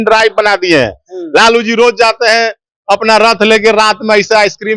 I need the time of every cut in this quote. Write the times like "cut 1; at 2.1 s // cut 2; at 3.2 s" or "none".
none